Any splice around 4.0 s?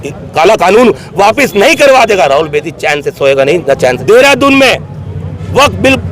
yes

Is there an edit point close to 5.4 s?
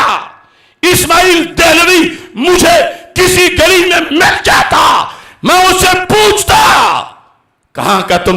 no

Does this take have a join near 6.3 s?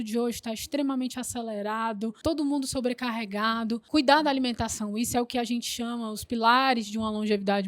no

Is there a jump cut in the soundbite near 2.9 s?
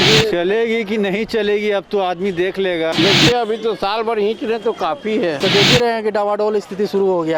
yes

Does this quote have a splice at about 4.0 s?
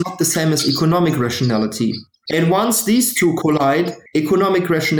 yes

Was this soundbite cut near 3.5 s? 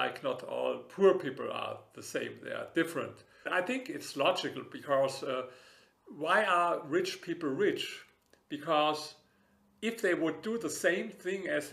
yes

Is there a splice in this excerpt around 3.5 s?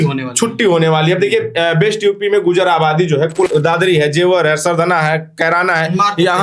yes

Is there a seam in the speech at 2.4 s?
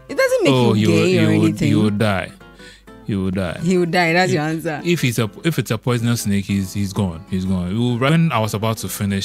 no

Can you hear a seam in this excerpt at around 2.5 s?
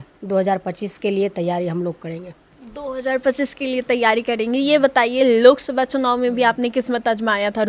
no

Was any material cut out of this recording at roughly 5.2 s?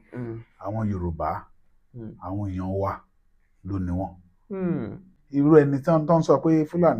yes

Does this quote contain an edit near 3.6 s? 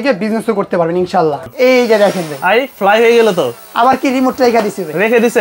no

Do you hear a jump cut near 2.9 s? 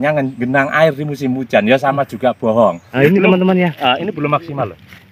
yes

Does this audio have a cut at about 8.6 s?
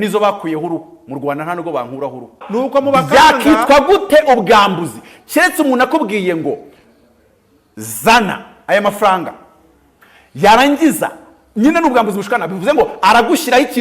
no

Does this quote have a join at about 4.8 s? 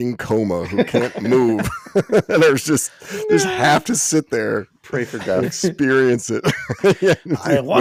no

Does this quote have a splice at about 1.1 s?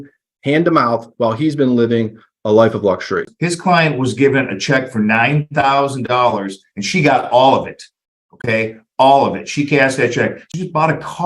no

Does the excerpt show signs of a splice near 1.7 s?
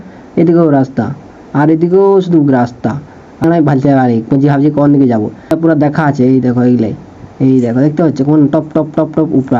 no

